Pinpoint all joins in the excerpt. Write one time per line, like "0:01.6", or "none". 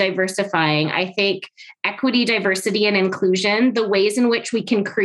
none